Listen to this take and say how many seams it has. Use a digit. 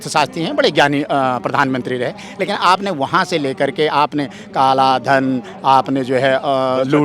0